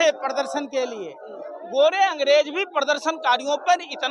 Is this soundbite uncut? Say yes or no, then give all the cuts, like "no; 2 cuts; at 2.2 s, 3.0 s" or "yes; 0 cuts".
yes; 0 cuts